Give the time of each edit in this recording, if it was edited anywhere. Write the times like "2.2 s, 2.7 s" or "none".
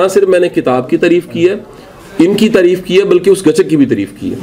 none